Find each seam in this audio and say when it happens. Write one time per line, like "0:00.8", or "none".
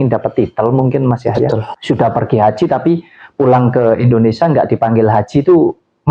0:01.7